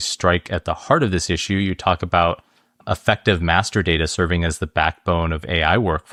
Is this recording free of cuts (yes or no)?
yes